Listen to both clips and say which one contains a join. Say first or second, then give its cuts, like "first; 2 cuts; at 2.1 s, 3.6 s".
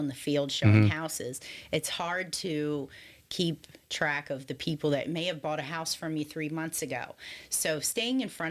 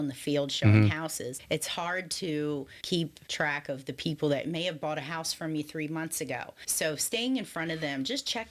second; 3 cuts; at 1.4 s, 3.0 s, 6.6 s